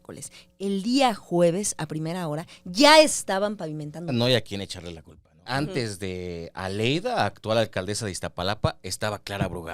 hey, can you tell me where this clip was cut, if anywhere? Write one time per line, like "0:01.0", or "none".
0:04.1
0:05.5

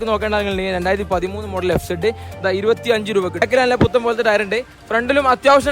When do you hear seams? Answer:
0:03.4

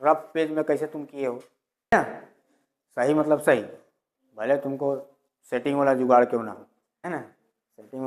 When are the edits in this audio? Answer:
0:01.9
0:07.0

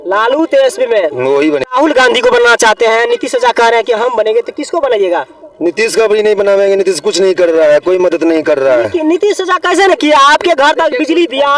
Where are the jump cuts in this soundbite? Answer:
0:01.7

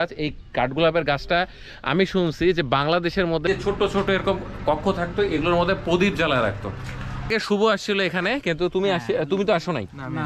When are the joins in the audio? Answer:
0:03.4
0:07.3

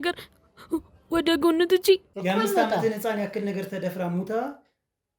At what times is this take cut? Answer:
0:02.1

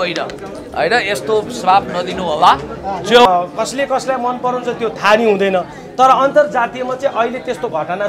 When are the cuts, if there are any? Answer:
0:03.3

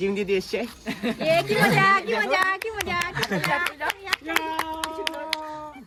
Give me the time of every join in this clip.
none

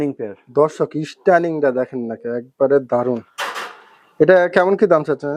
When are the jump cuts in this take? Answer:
none

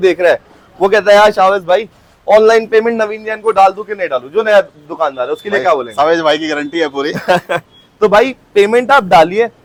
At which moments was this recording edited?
none

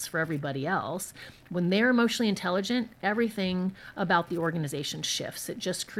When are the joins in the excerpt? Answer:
none

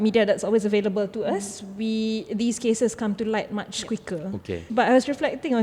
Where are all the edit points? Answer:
0:04.7

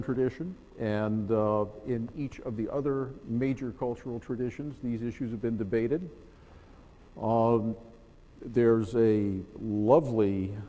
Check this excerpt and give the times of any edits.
none

